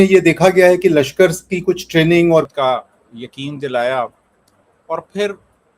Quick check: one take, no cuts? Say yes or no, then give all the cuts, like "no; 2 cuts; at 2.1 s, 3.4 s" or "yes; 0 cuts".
no; 1 cut; at 2.5 s